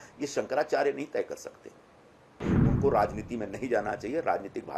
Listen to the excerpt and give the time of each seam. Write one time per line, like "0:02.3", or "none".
0:02.4